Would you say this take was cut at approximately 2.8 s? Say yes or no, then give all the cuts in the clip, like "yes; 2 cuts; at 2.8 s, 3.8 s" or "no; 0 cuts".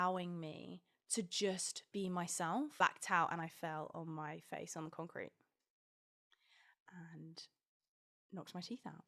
yes; 1 cut; at 2.8 s